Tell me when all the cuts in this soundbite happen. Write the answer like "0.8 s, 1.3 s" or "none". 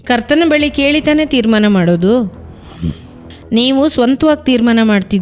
none